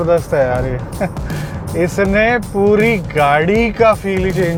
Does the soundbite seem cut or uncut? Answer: uncut